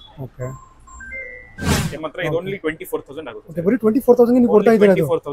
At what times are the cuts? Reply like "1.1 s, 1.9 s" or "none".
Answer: 1.9 s